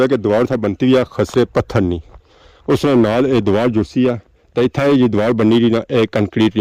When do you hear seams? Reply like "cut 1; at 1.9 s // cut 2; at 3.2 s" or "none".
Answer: none